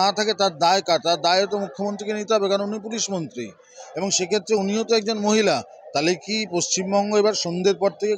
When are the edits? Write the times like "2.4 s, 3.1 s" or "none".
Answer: none